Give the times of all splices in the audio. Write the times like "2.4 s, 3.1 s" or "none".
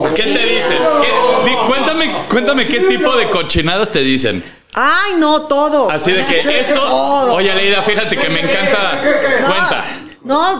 none